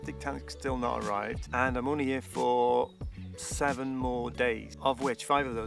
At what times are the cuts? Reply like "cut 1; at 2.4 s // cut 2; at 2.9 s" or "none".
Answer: cut 1; at 4.7 s